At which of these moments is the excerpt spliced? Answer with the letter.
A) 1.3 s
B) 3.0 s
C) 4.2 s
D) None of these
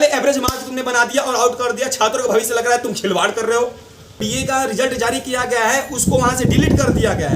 C